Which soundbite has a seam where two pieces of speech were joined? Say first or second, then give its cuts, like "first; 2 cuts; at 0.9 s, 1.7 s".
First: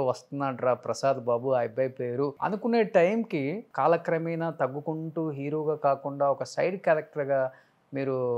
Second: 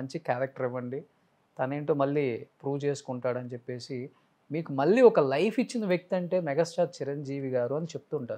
first; 2 cuts; at 2.4 s, 3.6 s